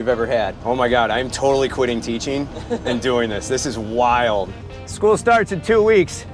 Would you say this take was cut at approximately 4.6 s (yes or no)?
yes